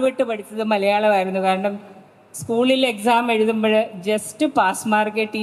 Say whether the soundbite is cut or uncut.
uncut